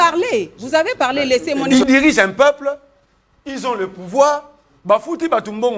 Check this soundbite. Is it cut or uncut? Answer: cut